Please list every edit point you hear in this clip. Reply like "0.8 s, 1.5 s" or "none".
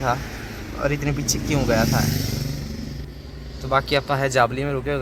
none

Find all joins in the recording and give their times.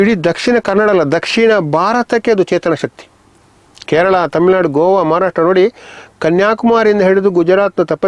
none

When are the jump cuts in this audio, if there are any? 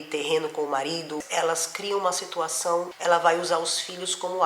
1.2 s, 2.9 s

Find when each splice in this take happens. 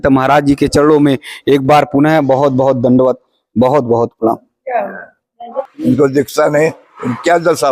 5.5 s

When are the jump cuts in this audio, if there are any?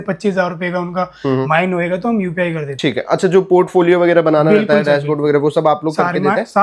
2.7 s

